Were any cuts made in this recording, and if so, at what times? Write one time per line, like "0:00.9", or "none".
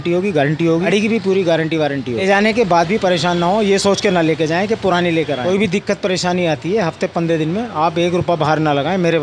0:00.9
0:02.2
0:05.4